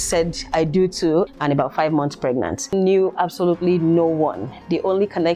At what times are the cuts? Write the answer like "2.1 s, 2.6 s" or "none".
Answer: 1.3 s, 2.7 s